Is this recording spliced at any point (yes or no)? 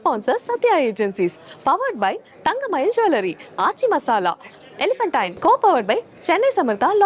yes